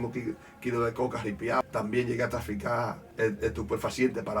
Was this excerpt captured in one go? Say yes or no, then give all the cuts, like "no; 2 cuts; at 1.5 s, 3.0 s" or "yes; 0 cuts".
no; 2 cuts; at 1.6 s, 3.0 s